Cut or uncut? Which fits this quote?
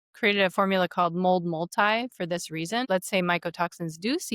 cut